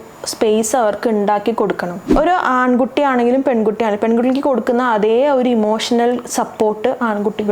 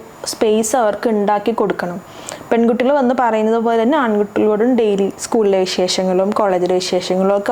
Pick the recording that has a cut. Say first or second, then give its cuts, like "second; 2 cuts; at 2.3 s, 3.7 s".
first; 1 cut; at 2.0 s